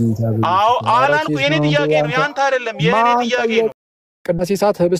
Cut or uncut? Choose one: cut